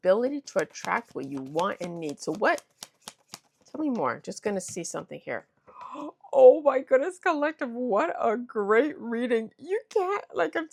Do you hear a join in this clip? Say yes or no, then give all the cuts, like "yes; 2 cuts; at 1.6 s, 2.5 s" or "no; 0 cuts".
no; 0 cuts